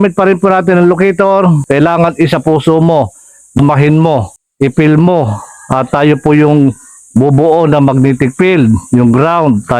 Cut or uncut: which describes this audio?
cut